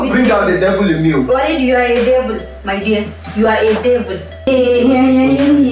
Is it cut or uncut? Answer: cut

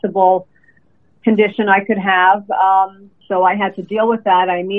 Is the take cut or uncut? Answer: cut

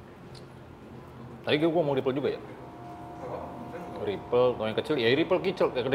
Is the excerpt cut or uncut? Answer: uncut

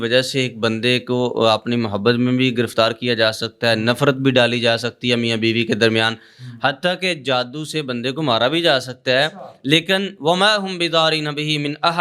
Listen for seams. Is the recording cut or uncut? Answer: uncut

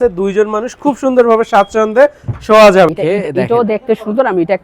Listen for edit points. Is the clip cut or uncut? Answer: cut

